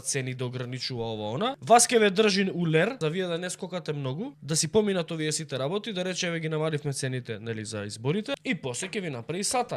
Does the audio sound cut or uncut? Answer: cut